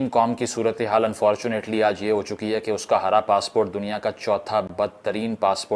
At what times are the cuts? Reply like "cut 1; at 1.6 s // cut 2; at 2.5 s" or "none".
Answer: none